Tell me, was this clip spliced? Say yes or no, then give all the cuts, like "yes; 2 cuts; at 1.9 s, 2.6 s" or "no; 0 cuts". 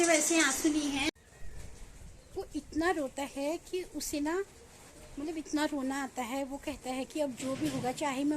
yes; 1 cut; at 1.1 s